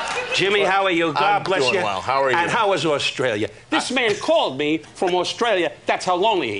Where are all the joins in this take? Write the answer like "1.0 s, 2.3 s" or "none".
5.4 s